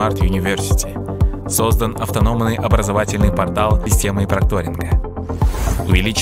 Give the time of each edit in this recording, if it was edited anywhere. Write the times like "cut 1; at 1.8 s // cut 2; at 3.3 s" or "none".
cut 1; at 3.8 s